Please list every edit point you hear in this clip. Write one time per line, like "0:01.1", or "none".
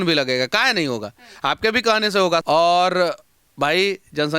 0:02.4